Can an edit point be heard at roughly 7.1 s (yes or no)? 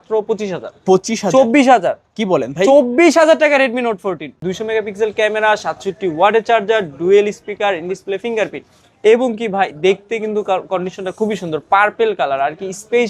no